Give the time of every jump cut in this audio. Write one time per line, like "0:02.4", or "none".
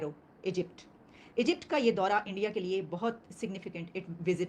none